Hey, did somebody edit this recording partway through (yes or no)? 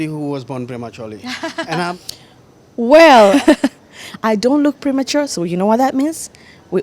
yes